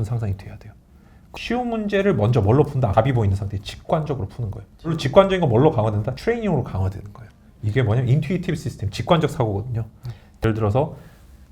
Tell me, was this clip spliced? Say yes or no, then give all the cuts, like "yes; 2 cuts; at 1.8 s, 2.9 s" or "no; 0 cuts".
yes; 5 cuts; at 1.2 s, 2.9 s, 5.0 s, 6.1 s, 10.3 s